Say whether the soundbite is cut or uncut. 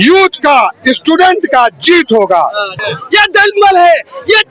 cut